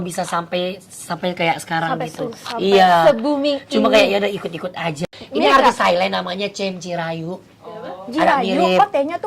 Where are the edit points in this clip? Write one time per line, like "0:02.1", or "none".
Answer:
0:05.1